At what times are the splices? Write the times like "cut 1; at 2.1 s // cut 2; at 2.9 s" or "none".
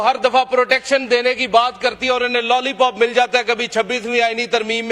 none